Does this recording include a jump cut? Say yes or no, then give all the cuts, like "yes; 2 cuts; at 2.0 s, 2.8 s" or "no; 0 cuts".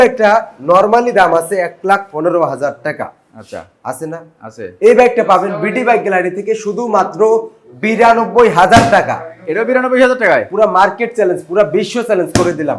no; 0 cuts